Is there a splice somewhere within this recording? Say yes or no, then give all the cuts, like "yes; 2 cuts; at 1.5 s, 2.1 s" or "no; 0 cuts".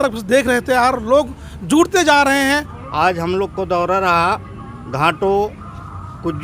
yes; 1 cut; at 2.8 s